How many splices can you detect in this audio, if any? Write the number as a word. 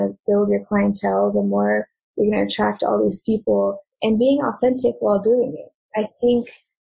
two